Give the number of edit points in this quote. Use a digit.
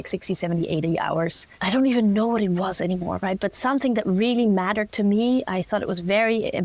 1